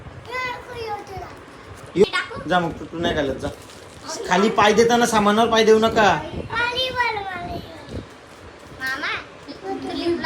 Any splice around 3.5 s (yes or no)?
no